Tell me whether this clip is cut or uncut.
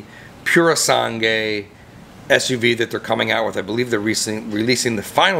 uncut